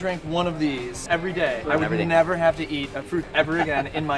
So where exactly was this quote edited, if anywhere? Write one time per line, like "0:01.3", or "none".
0:01.3
0:03.1